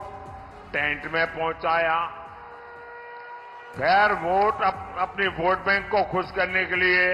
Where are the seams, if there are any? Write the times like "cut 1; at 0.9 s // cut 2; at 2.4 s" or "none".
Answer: none